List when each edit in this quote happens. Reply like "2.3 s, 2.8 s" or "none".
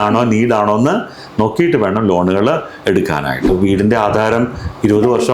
3.5 s